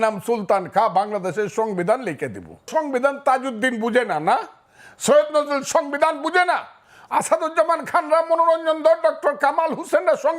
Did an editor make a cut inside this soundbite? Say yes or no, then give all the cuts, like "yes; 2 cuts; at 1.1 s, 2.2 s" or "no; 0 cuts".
yes; 1 cut; at 2.7 s